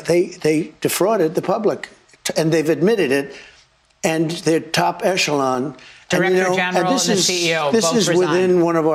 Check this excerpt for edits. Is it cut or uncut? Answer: uncut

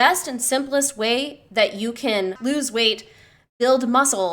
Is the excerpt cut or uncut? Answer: cut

